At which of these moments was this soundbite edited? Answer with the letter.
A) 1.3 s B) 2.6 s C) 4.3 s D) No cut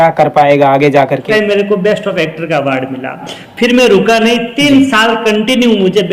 A